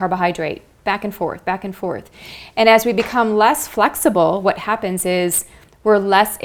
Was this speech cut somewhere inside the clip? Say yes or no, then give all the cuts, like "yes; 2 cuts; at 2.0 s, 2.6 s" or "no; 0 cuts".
no; 0 cuts